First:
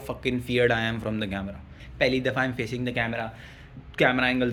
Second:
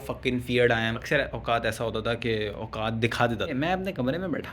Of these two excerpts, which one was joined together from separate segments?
second; 2 cuts; at 1.0 s, 3.5 s

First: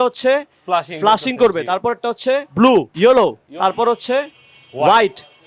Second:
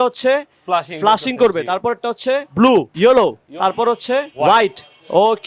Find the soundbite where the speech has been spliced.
second; 1 cut; at 4.3 s

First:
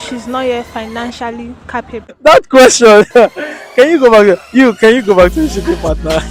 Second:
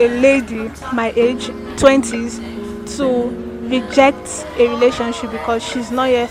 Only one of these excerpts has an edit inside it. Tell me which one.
first; 1 cut; at 2.1 s

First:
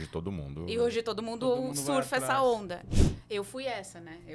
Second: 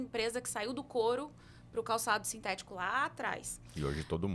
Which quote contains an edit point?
first; 1 cut; at 2.9 s

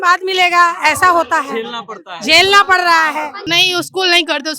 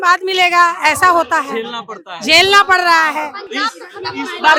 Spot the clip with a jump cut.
first; 1 cut; at 3.4 s

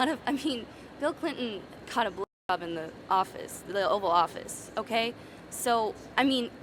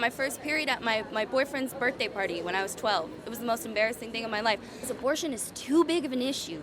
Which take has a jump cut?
second; 1 cut; at 4.9 s

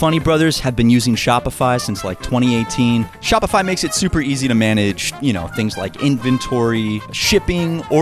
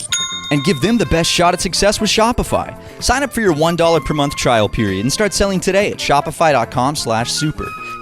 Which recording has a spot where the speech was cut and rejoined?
first; 2 cuts; at 3.2 s, 7.1 s

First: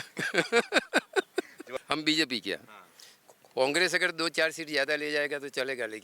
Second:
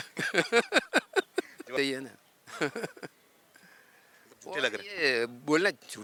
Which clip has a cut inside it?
first; 1 cut; at 1.6 s

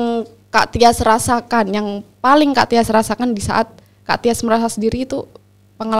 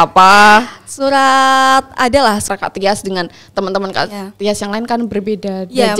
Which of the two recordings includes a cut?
second; 1 cut; at 2.5 s

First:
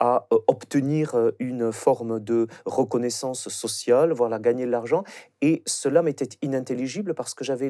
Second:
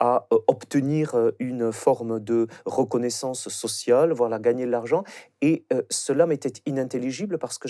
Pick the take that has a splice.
first; 1 cut; at 5.6 s

